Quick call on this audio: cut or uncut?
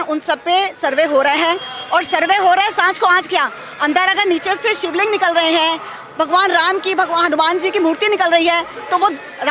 uncut